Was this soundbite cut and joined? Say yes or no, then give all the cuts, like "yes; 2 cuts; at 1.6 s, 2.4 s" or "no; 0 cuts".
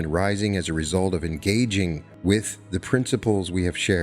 yes; 1 cut; at 2.1 s